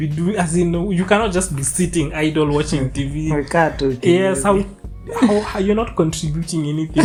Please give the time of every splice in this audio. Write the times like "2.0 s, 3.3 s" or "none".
none